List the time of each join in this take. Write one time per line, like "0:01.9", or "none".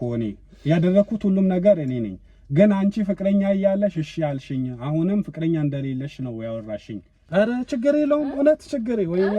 0:07.2